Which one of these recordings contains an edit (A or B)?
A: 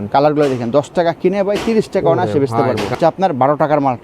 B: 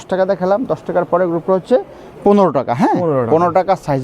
A